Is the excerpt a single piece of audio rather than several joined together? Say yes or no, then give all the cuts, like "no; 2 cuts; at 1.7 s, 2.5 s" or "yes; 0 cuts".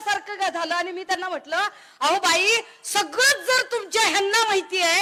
yes; 0 cuts